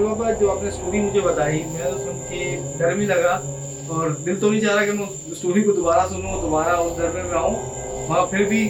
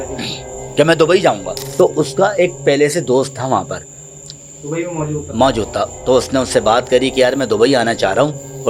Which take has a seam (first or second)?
second